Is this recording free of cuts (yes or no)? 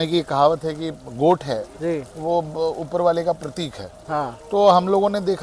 no